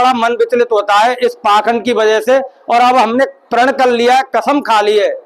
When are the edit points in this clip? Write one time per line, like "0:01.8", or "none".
none